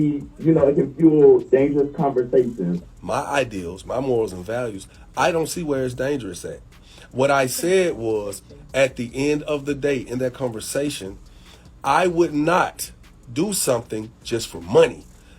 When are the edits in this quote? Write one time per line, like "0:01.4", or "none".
0:02.9